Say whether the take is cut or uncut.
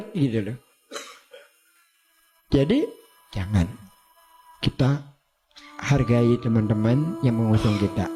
uncut